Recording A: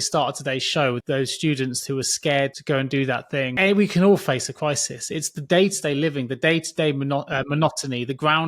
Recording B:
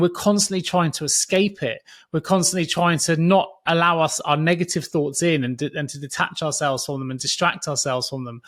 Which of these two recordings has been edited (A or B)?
A